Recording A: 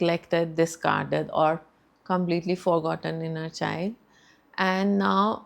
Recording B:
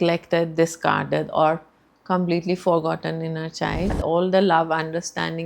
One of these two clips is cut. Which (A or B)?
B